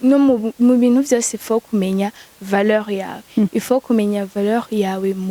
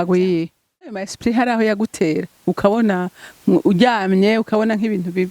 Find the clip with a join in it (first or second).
second